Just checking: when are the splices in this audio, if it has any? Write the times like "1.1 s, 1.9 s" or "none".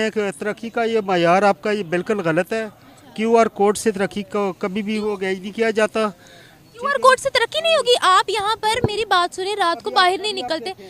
none